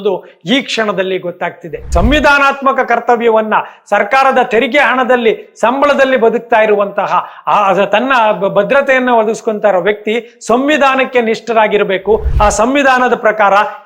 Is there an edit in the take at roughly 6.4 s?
no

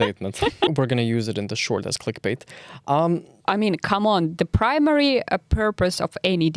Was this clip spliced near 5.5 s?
no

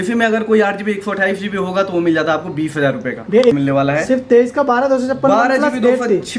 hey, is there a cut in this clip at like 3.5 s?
yes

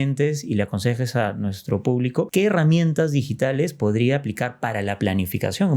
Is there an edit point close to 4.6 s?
no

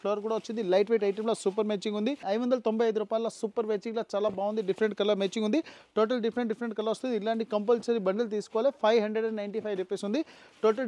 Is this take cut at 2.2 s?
no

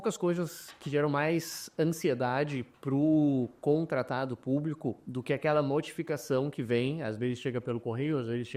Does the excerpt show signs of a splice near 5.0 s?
no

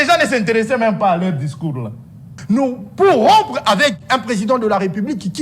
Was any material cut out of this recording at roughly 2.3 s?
yes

